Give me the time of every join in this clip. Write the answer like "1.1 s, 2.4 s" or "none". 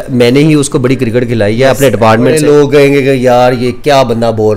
2.4 s